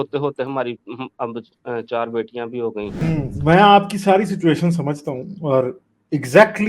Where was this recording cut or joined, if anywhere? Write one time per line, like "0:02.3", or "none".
0:03.0